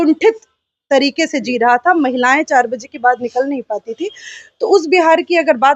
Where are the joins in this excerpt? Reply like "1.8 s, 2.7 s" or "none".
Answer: none